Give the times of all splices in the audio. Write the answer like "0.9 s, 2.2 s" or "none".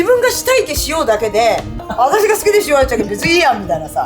1.8 s